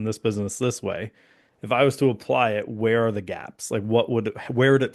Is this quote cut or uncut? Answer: uncut